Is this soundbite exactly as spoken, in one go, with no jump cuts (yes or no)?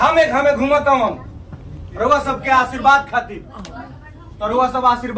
yes